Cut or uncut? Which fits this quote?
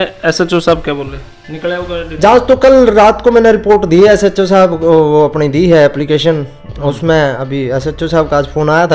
uncut